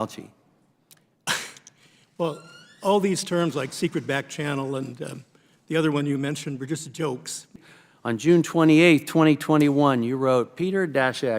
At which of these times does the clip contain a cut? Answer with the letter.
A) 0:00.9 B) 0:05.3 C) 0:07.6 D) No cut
C